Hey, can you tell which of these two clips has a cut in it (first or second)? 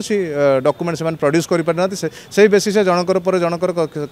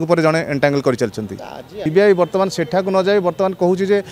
second